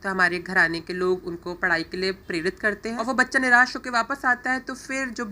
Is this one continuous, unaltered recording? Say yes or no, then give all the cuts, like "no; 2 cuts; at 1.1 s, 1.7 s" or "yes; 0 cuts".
no; 1 cut; at 3.0 s